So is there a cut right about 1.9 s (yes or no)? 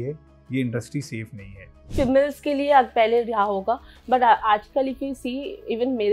yes